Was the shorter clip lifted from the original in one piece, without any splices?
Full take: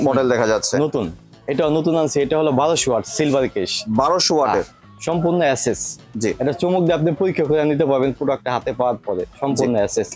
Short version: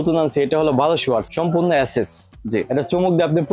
no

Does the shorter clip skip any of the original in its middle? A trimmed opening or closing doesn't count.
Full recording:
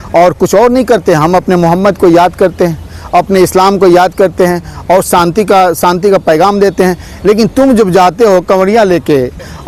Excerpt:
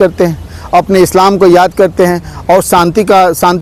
no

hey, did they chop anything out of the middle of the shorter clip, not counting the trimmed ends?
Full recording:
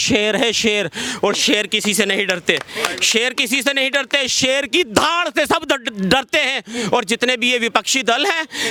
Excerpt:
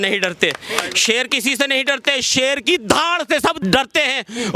yes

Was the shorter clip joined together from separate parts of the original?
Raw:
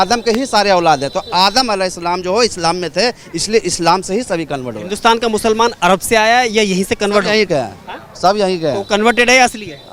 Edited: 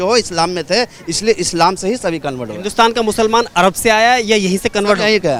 no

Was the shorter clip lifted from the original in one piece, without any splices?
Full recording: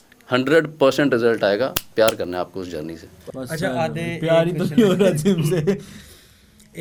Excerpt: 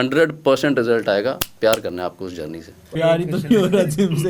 no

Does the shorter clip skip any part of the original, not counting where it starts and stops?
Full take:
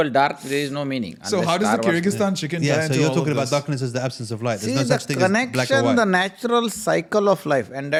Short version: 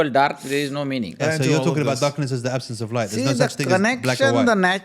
yes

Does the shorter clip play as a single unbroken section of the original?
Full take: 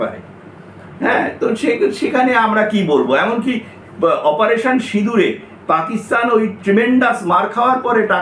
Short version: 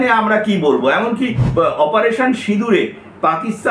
no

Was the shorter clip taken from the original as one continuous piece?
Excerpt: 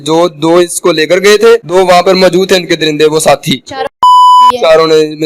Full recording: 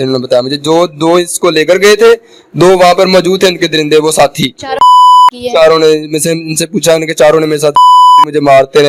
no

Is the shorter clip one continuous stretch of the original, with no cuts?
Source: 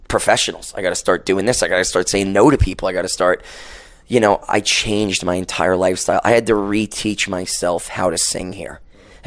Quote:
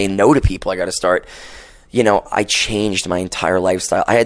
yes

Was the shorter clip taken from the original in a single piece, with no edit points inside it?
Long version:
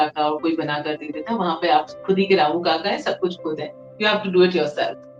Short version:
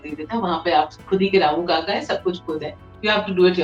yes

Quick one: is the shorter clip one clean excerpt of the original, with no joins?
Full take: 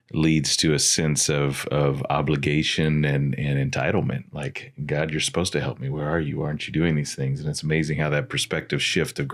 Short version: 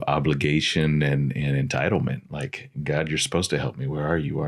yes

